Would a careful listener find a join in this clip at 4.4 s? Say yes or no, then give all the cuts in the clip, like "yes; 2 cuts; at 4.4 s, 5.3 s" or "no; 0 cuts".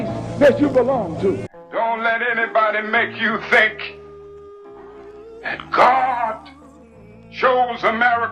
no; 1 cut; at 1.5 s